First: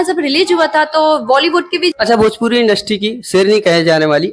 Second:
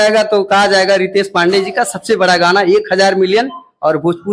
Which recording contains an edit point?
first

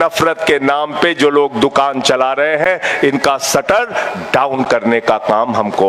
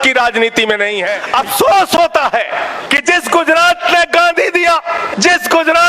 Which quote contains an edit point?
second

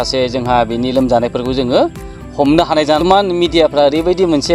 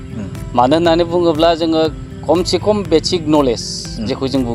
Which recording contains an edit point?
first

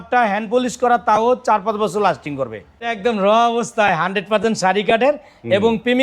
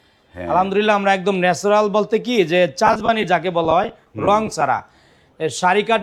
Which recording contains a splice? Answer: first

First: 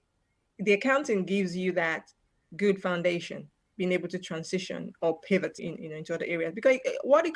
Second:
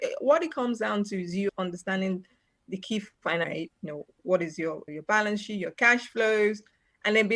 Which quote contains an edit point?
second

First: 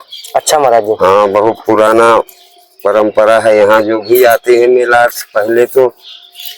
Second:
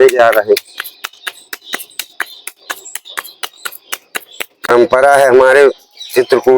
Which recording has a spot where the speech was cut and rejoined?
second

